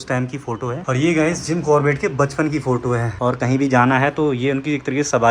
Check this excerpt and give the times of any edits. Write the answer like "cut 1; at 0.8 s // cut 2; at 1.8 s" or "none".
cut 1; at 0.8 s // cut 2; at 3.1 s